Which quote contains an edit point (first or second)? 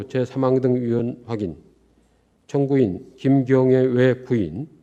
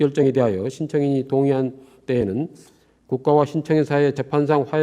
second